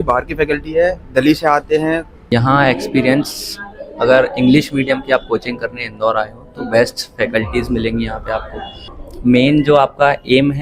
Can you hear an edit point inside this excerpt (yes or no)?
yes